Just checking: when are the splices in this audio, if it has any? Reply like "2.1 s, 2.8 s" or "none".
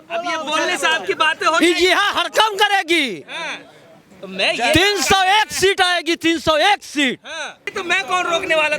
7.7 s